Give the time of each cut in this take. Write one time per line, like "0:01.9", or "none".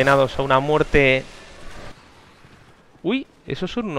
0:01.9